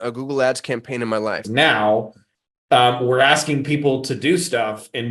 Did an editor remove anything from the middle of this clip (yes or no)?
yes